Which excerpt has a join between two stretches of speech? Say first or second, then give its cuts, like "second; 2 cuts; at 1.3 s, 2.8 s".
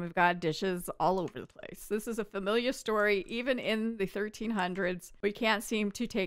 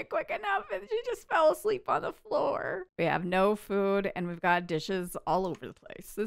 second; 1 cut; at 2.8 s